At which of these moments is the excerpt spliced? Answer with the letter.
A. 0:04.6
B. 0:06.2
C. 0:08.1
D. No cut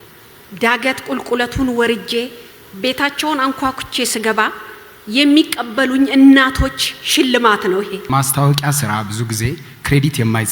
C